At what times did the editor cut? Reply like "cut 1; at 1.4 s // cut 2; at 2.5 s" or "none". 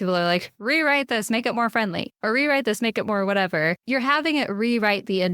cut 1; at 2.1 s // cut 2; at 3.8 s